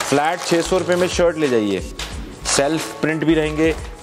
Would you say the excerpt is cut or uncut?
uncut